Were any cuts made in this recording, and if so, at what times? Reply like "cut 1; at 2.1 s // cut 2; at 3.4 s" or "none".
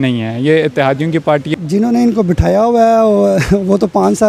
cut 1; at 1.5 s